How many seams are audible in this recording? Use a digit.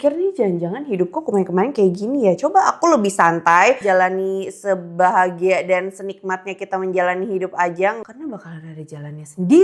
2